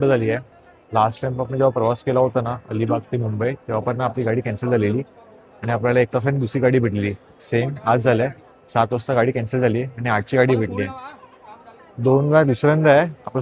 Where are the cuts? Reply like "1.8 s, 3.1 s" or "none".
none